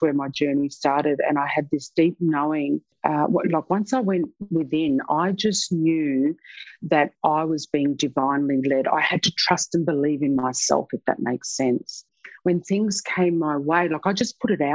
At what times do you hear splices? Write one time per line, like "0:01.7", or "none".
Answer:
0:02.9